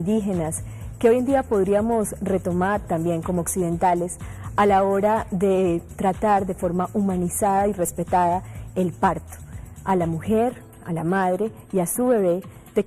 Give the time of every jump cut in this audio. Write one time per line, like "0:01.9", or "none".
0:11.9